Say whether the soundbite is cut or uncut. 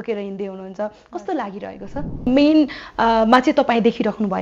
cut